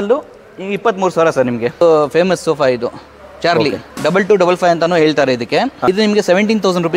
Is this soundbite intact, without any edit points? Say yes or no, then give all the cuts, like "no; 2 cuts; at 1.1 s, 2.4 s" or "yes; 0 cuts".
no; 3 cuts; at 1.8 s, 3.9 s, 5.8 s